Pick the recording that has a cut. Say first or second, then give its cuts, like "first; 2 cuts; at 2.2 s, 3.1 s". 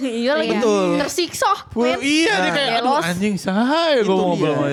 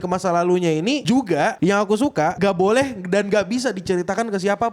second; 2 cuts; at 1.0 s, 2.4 s